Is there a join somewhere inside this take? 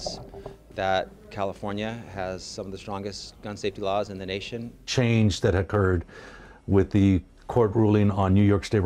no; 0 cuts

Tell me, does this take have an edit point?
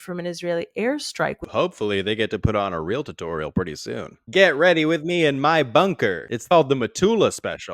yes; 2 cuts; at 1.4 s, 6.4 s

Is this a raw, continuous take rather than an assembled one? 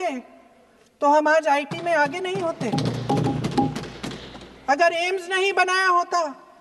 yes; 0 cuts

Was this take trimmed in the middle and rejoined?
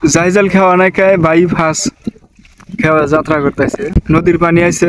yes; 1 cut; at 3.9 s

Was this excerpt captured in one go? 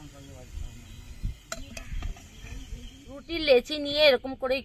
yes; 0 cuts

